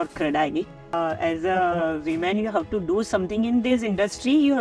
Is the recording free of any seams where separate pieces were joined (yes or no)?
no